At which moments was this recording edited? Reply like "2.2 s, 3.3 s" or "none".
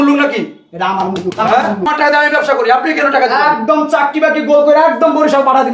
1.9 s